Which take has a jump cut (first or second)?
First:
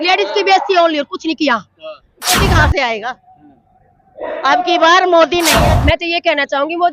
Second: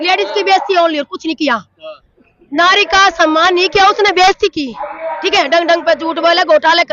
first